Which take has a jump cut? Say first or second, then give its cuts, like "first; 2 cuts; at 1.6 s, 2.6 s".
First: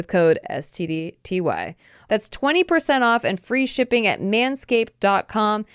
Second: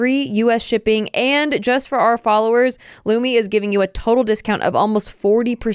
first; 1 cut; at 1.9 s